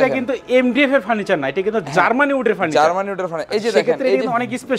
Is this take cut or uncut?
uncut